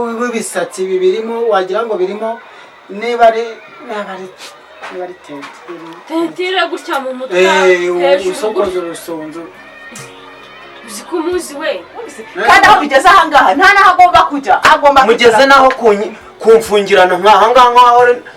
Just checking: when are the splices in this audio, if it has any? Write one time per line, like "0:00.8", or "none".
0:12.2